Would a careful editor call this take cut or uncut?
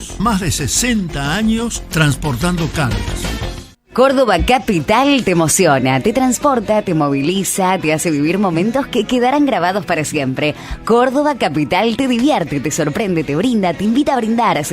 uncut